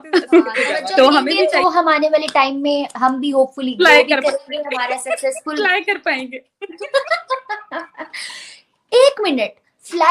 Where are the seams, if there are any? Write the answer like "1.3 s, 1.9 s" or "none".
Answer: 1.6 s